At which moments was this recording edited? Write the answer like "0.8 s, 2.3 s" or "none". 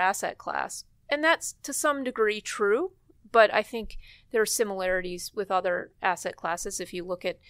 none

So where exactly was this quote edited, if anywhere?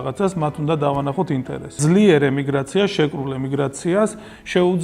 1.8 s

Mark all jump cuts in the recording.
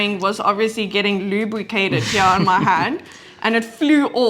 none

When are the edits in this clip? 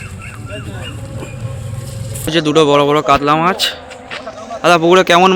2.3 s

